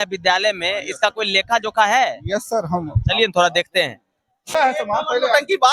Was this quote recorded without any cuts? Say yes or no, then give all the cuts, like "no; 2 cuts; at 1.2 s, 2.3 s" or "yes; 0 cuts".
no; 1 cut; at 4.6 s